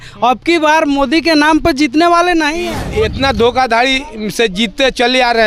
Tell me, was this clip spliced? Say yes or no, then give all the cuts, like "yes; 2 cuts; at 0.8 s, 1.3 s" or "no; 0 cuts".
yes; 1 cut; at 2.8 s